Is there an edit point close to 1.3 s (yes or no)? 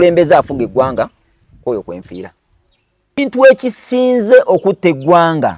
no